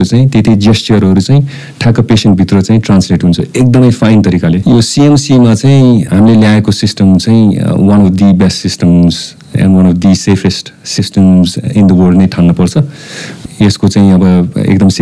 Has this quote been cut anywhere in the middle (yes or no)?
yes